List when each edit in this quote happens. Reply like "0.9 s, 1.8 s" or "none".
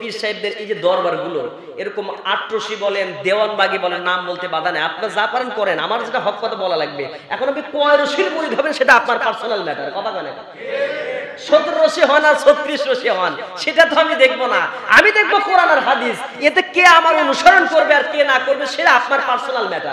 none